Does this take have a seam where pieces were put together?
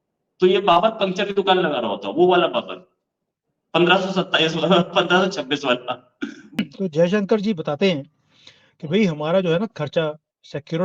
yes; 1 cut; at 6.6 s

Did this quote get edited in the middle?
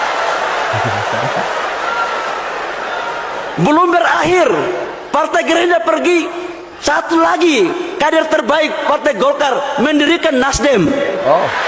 no; 0 cuts

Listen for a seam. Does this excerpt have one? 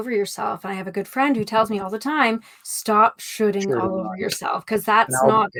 no; 0 cuts

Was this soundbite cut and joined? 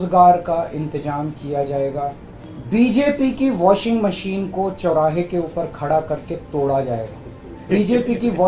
yes; 2 cuts; at 2.3 s, 7.6 s

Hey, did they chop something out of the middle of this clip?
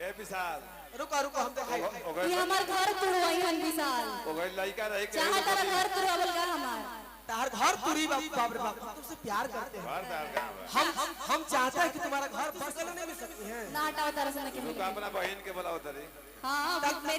yes; 1 cut; at 12.6 s

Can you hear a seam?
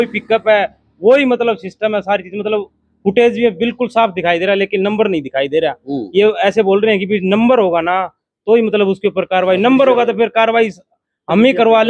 no; 0 cuts

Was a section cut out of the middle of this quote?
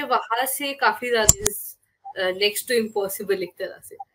yes; 1 cut; at 1.4 s

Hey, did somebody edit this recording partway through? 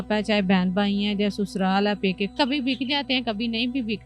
yes; 1 cut; at 2.3 s

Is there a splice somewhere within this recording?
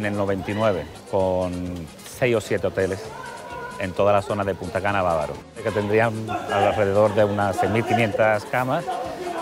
yes; 2 cuts; at 1.0 s, 5.7 s

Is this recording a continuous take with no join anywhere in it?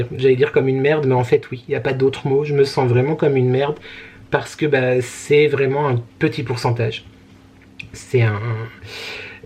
yes; 0 cuts

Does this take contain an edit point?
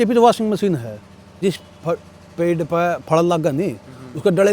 yes; 1 cut; at 1.4 s

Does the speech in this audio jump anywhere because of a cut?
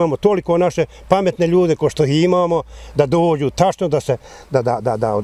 no; 0 cuts

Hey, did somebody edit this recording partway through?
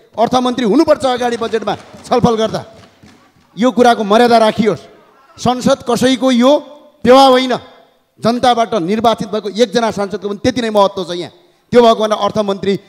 no; 0 cuts

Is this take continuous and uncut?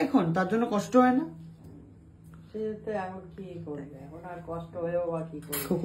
yes; 0 cuts

